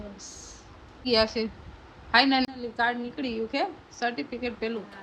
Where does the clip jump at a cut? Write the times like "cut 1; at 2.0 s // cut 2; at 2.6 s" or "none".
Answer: cut 1; at 1.1 s